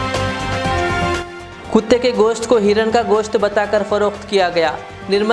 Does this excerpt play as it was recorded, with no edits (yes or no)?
no